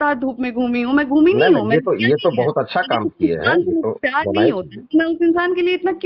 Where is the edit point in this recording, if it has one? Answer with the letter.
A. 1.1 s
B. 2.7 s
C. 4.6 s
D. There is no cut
D